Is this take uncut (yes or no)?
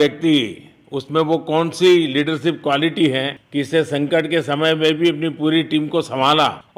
yes